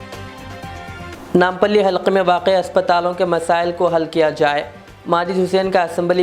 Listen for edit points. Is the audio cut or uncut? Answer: cut